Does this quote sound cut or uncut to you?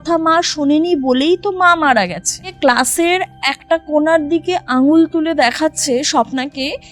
cut